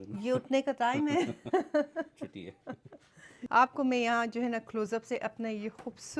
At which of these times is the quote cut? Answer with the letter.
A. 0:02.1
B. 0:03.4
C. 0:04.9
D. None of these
B